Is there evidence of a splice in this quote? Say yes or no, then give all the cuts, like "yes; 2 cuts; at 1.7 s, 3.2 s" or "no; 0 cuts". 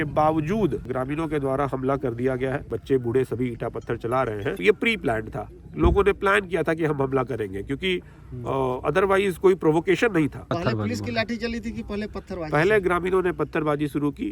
yes; 4 cuts; at 0.9 s, 2.7 s, 4.6 s, 10.5 s